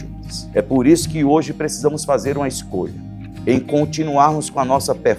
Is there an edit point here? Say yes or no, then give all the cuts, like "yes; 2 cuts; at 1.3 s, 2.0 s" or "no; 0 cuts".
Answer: no; 0 cuts